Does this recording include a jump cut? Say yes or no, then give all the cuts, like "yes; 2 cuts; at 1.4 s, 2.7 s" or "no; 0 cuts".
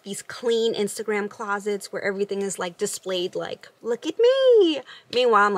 no; 0 cuts